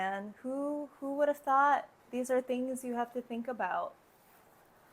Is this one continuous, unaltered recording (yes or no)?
yes